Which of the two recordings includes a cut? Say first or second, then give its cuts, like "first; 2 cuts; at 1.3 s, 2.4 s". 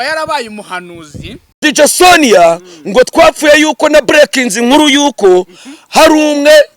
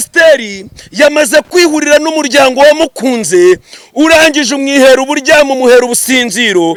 first; 1 cut; at 1.6 s